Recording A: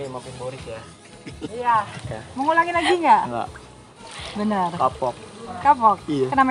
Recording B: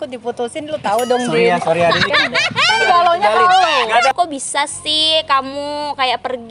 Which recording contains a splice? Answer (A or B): B